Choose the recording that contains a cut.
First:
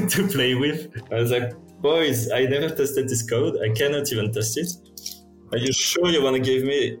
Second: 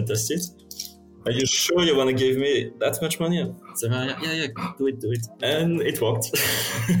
first; 1 cut; at 0.9 s

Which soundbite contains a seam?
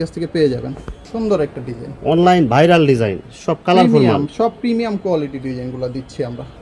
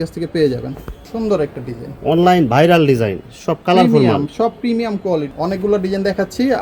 second; 1 cut; at 5.3 s

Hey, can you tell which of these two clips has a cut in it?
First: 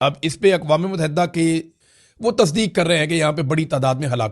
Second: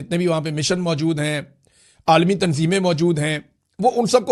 first; 1 cut; at 1.8 s

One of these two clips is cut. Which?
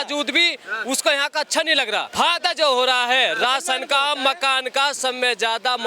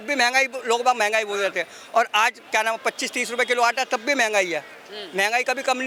first; 1 cut; at 2.1 s

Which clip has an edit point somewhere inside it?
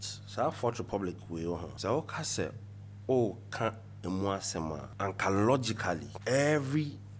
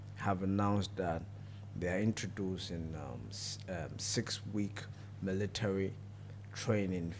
first; 3 cuts; at 1.7 s, 4.9 s, 6.1 s

